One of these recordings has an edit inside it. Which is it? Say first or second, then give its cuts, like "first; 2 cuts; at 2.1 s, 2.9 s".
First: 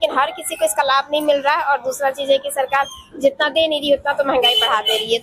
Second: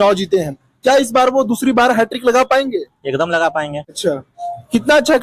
second; 1 cut; at 3.8 s